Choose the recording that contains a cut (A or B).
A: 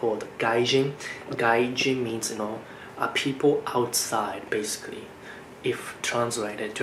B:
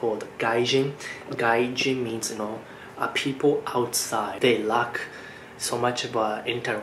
B